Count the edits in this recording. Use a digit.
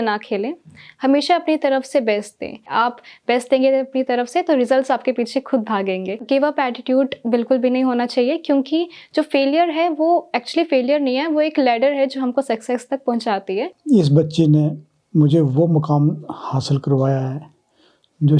3